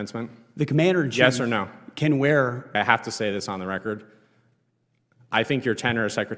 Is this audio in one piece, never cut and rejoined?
no; 1 cut; at 2.7 s

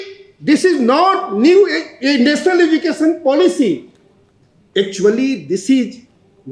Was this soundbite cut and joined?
no; 0 cuts

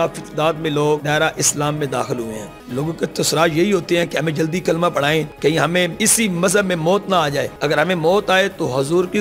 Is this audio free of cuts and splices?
no; 5 cuts; at 1.0 s, 2.5 s, 5.3 s, 5.9 s, 7.5 s

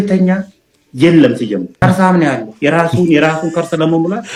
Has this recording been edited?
no; 0 cuts

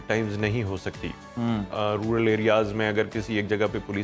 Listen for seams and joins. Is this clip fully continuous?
yes; 0 cuts

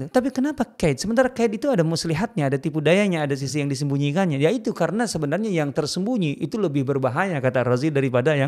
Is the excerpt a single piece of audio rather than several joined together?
yes; 0 cuts

